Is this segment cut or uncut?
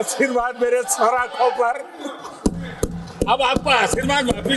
uncut